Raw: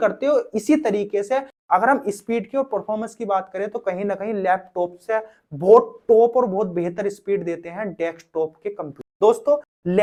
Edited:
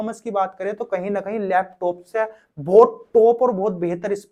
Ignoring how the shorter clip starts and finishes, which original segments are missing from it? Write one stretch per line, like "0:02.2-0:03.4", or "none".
none